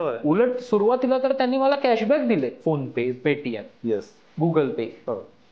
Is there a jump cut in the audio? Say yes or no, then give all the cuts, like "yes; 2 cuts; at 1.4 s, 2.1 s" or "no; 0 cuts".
yes; 1 cut; at 2.6 s